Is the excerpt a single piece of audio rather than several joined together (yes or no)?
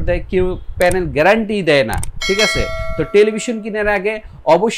yes